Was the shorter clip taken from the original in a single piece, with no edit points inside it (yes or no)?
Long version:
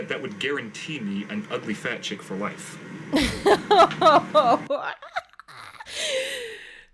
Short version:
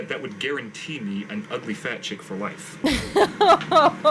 no